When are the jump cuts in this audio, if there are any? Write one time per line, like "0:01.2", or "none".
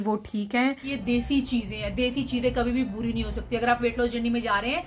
0:00.9